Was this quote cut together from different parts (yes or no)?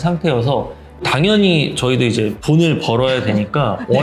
yes